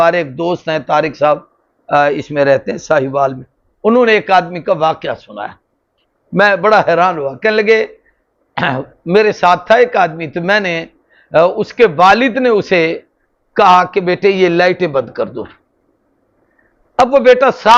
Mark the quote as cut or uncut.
uncut